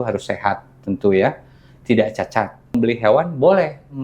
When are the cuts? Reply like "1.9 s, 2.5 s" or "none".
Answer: 2.7 s